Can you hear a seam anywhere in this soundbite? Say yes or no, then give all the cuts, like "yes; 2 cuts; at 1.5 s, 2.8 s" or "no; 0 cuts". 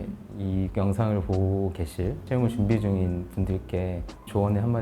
yes; 1 cut; at 2.2 s